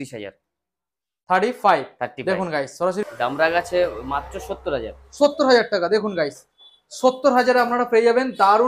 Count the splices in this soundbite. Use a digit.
1